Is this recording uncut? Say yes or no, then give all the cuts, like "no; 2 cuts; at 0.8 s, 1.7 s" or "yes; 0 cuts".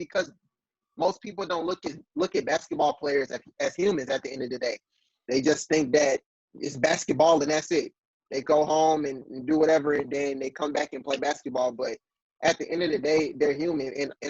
yes; 0 cuts